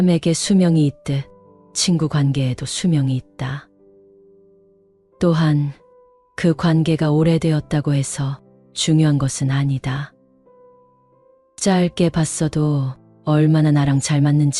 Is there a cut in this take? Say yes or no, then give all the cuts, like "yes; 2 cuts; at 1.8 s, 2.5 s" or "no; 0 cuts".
no; 0 cuts